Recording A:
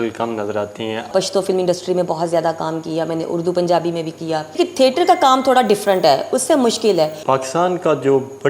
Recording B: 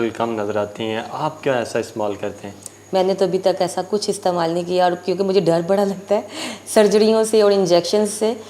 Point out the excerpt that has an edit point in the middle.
A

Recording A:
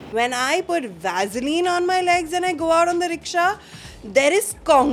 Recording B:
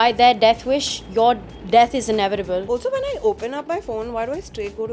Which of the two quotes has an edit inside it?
B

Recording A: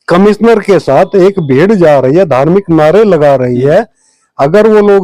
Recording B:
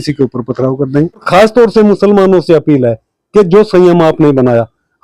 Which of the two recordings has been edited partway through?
B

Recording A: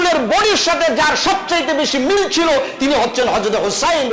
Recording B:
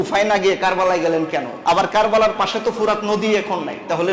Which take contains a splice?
B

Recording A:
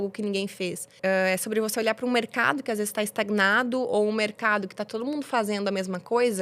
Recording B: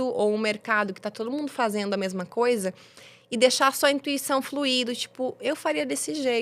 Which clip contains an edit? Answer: A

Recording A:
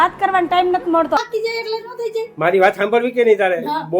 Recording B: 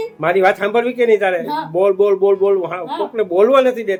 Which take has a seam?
A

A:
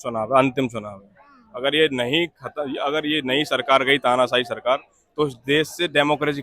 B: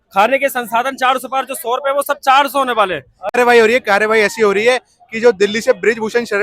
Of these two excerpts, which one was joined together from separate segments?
B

